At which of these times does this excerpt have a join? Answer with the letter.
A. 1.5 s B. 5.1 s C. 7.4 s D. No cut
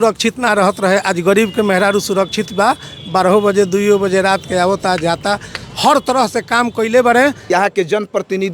C